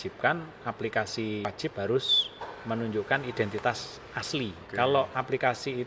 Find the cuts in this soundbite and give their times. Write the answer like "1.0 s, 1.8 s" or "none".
1.4 s, 4.6 s